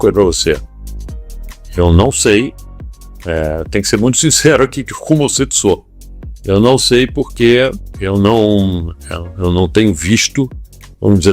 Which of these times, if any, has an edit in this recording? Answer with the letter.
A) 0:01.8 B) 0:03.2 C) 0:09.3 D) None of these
A